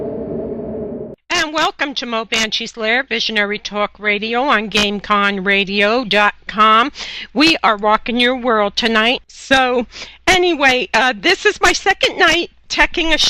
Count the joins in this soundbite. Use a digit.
1